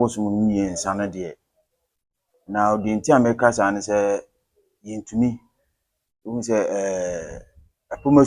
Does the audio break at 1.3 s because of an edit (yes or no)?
no